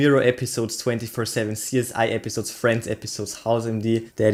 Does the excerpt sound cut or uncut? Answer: uncut